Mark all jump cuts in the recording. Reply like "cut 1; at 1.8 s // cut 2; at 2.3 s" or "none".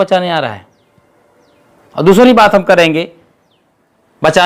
none